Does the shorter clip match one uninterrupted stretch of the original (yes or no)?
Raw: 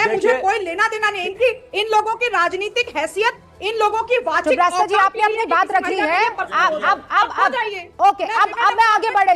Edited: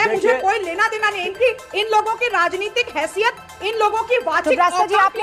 yes